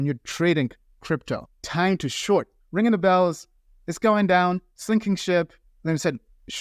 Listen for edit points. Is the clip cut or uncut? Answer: cut